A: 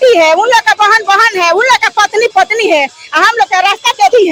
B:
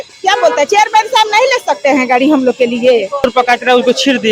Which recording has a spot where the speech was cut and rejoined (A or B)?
B